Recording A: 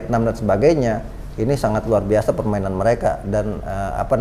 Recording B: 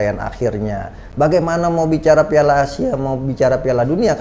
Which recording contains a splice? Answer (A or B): B